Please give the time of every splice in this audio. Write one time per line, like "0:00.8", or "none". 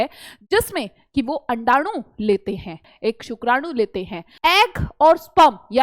0:02.9
0:04.2